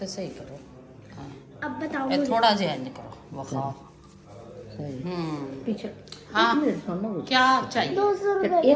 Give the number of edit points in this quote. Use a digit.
0